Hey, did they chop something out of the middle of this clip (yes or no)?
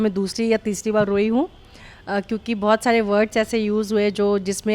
no